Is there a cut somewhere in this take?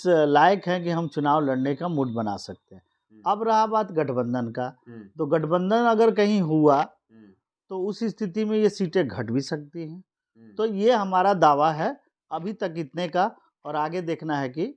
no; 0 cuts

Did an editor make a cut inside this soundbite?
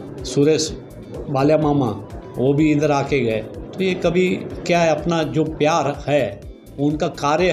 no; 0 cuts

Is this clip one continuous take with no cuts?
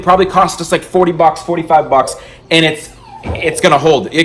yes; 0 cuts

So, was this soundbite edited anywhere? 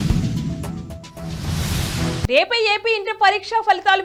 no; 0 cuts

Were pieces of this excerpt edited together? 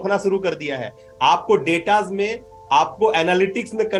no; 0 cuts

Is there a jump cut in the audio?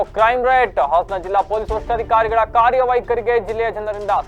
no; 0 cuts

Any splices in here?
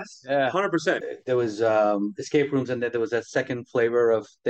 yes; 1 cut; at 1.0 s

